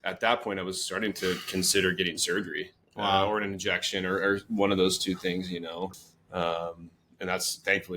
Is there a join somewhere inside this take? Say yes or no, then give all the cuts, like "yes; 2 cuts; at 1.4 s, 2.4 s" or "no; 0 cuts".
yes; 1 cut; at 5.9 s